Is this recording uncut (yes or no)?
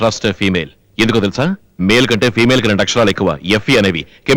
yes